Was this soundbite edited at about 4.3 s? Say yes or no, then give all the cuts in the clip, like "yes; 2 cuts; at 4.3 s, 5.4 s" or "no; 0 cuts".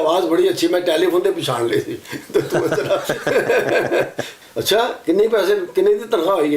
yes; 1 cut; at 4.3 s